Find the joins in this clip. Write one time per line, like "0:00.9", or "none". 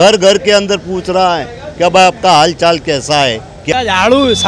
0:03.6